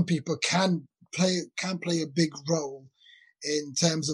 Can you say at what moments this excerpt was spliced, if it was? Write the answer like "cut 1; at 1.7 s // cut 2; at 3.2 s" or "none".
none